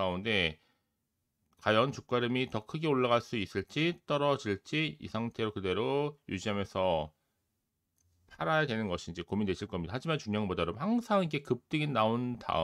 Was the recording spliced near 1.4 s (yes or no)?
no